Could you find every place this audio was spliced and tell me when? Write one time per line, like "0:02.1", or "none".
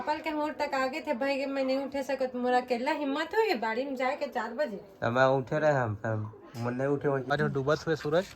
0:07.3